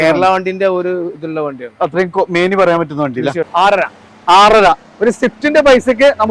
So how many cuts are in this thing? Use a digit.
1